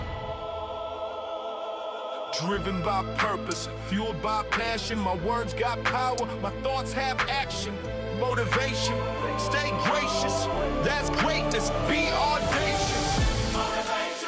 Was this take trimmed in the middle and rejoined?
no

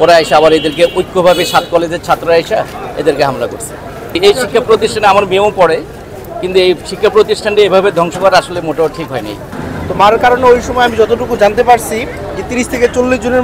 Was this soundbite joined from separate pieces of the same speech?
no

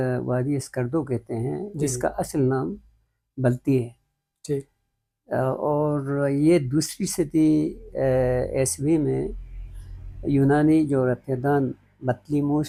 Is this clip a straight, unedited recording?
yes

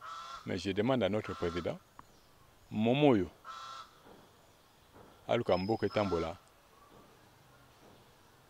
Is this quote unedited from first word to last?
yes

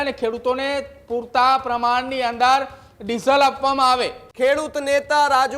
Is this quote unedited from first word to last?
no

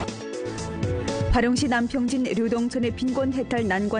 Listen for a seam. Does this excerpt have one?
no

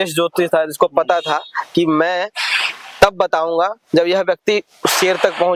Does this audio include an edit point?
no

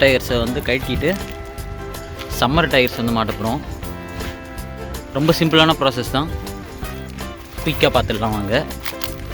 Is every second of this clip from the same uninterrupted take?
yes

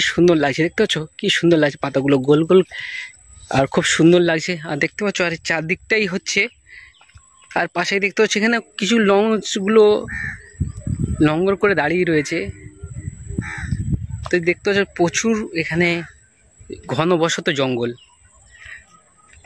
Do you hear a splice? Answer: no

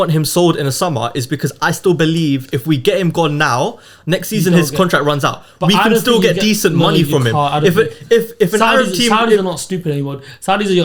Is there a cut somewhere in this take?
no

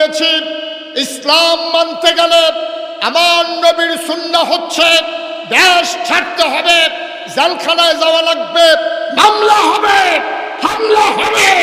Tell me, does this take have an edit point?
no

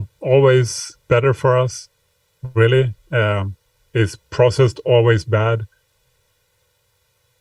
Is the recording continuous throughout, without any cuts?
yes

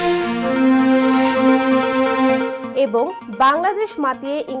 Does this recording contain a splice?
yes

